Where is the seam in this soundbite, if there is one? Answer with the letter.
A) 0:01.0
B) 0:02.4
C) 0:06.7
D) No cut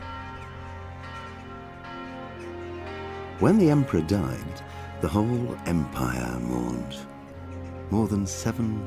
D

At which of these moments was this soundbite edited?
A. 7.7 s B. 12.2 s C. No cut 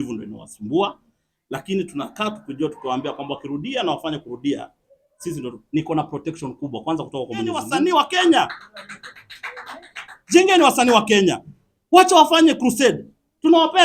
A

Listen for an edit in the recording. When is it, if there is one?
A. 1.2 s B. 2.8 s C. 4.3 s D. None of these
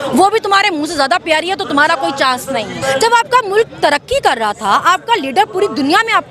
B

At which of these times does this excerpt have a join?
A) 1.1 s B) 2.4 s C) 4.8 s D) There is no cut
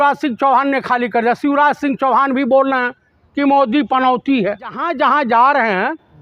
C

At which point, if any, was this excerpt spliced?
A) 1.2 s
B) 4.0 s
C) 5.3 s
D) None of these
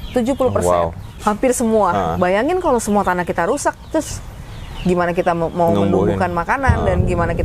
A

